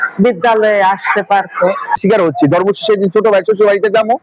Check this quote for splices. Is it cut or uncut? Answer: cut